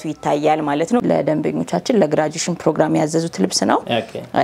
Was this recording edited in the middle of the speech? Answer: yes; 1 cut; at 1.0 s

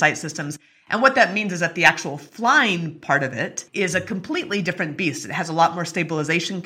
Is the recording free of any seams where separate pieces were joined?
yes; 0 cuts

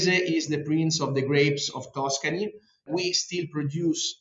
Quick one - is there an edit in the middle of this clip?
yes; 1 cut; at 2.8 s

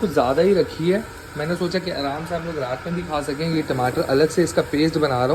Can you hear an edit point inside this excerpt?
no; 0 cuts

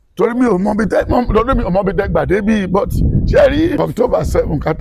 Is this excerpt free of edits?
no; 1 cut; at 3.8 s

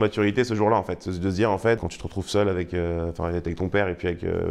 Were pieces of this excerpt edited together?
no; 0 cuts

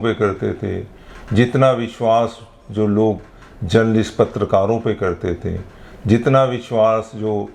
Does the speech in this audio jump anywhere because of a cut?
no; 0 cuts

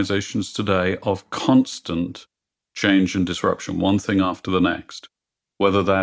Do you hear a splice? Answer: no; 0 cuts

